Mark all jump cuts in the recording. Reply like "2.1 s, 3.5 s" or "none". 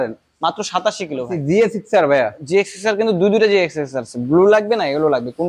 1.4 s